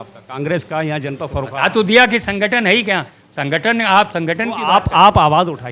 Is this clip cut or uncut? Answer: uncut